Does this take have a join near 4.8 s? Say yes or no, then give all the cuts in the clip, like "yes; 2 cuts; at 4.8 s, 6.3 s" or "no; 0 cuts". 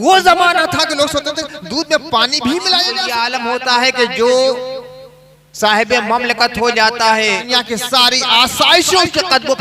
no; 2 cuts; at 3.1 s, 7.4 s